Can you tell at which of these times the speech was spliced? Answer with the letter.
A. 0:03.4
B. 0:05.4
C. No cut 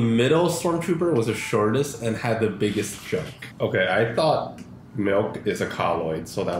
A